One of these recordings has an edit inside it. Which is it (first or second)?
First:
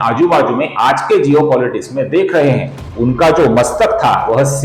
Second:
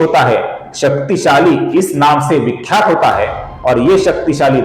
first